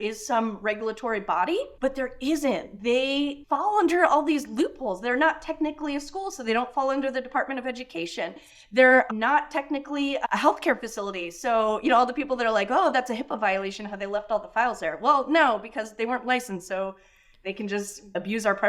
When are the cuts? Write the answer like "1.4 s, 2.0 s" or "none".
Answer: none